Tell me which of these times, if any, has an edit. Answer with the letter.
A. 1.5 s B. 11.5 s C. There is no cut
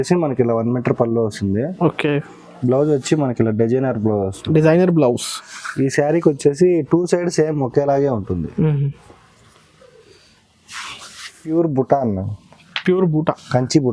B